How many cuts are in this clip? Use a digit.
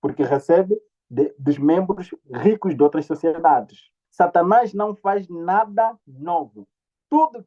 1